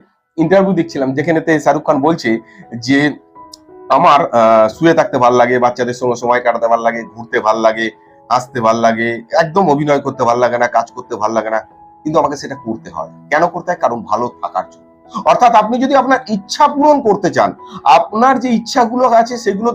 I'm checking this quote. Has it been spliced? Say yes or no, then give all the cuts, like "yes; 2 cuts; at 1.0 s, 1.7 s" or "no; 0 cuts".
no; 0 cuts